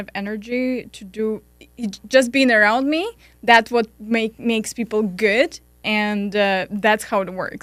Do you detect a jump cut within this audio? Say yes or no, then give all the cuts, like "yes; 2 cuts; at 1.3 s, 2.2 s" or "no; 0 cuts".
no; 0 cuts